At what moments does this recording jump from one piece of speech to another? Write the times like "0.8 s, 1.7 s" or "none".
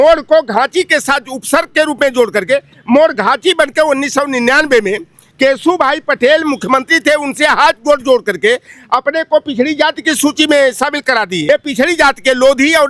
11.4 s